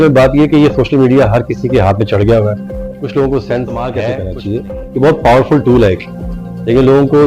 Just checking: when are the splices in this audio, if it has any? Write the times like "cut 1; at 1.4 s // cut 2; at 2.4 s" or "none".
cut 1; at 4.1 s